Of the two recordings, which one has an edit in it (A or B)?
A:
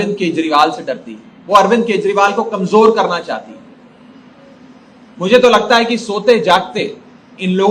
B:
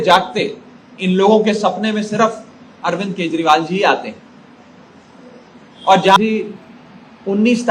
B